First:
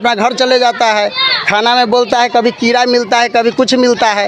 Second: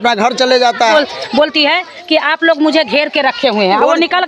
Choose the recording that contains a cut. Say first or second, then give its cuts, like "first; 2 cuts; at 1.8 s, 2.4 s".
second; 1 cut; at 0.9 s